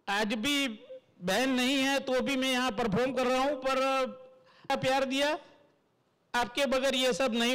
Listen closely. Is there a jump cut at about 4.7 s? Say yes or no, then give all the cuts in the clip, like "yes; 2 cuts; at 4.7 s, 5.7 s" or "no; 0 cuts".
yes; 1 cut; at 4.7 s